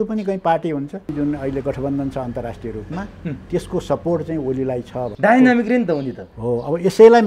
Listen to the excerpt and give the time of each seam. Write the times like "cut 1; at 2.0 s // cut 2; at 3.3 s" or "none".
cut 1; at 1.1 s // cut 2; at 5.0 s